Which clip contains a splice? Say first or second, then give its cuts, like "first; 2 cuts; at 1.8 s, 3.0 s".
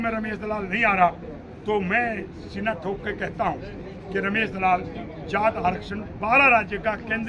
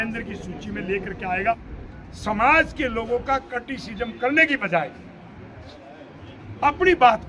second; 1 cut; at 1.7 s